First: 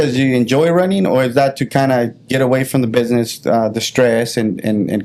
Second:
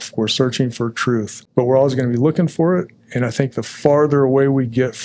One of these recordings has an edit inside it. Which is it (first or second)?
second